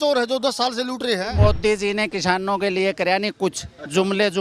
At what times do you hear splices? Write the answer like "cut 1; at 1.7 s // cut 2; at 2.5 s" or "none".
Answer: cut 1; at 1.3 s